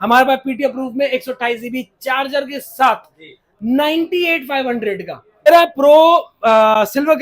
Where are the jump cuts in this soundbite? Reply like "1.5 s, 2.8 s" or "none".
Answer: 5.5 s